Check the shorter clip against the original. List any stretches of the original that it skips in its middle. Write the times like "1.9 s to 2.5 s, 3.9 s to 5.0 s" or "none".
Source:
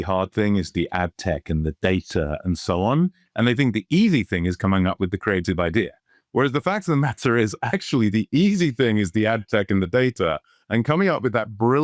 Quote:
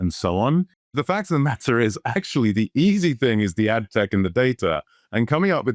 3.4 s to 6.5 s